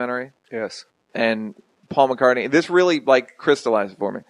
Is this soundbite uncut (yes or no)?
yes